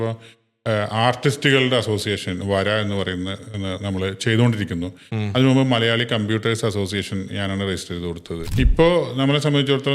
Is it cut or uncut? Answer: cut